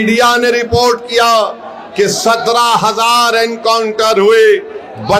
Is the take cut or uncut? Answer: uncut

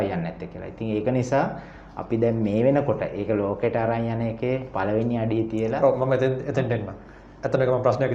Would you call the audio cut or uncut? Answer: uncut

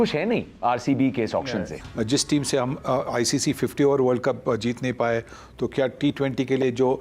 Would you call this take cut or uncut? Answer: cut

